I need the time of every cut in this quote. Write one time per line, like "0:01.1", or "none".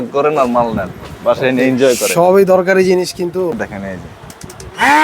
0:03.6